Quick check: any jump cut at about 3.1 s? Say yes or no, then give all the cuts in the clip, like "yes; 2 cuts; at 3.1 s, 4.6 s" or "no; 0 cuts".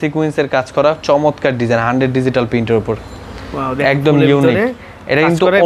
no; 0 cuts